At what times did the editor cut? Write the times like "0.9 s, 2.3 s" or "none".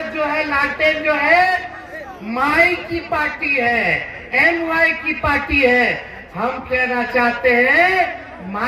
none